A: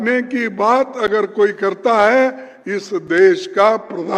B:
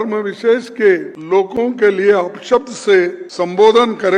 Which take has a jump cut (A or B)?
B